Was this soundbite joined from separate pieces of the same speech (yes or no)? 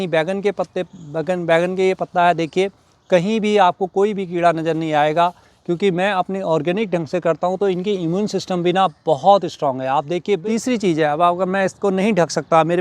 yes